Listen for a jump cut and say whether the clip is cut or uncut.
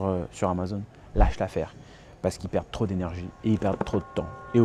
uncut